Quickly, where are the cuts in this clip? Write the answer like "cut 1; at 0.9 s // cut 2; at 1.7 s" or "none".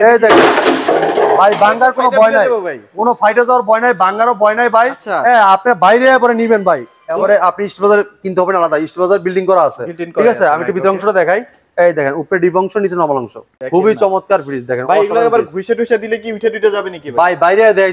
cut 1; at 7.0 s // cut 2; at 13.6 s